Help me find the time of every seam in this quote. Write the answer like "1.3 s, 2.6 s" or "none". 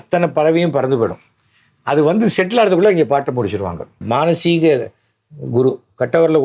4.0 s